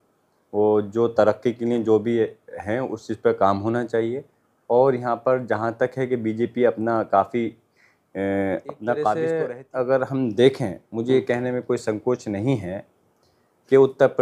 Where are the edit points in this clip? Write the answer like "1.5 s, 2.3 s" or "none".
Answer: 9.1 s